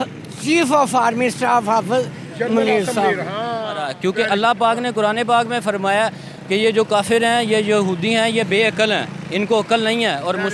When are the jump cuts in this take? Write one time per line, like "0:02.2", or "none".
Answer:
0:03.9